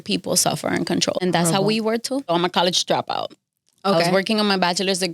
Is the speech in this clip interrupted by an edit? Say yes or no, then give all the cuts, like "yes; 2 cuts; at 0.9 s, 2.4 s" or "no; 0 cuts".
yes; 2 cuts; at 1.2 s, 2.2 s